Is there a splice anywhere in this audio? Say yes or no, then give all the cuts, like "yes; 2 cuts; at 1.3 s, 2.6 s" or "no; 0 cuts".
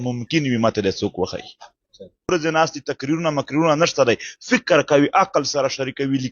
yes; 1 cut; at 2.3 s